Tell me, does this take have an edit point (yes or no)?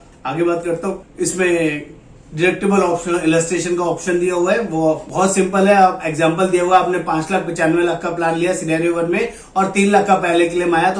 no